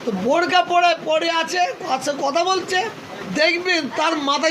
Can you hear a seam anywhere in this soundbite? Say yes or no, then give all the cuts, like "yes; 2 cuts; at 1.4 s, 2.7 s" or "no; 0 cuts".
yes; 1 cut; at 3.2 s